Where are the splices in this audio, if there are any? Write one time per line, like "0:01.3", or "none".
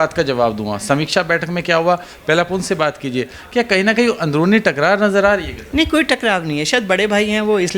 none

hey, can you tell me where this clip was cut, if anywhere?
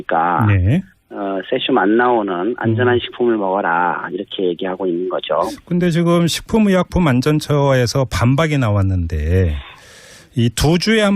0:07.9

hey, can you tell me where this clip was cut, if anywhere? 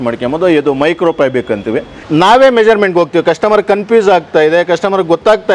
0:01.9

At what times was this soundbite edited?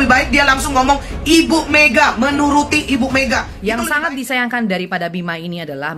0:03.5

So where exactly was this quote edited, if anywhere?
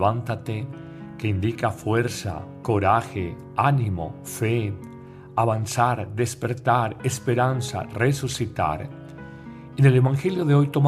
0:07.5

